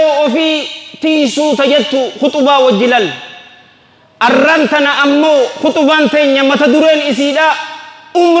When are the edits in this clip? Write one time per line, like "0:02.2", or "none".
none

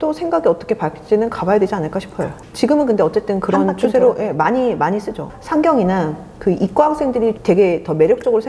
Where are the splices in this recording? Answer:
0:02.4
0:05.3
0:07.4

